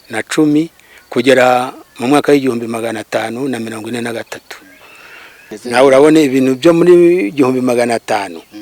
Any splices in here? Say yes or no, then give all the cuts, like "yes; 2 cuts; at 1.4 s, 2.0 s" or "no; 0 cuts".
yes; 1 cut; at 5.2 s